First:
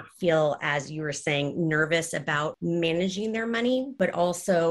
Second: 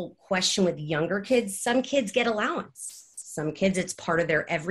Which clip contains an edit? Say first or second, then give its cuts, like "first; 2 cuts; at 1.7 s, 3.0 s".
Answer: first; 2 cuts; at 2.6 s, 3.9 s